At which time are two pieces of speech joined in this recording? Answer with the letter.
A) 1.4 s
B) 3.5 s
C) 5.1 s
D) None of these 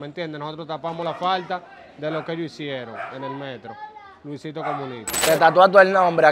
C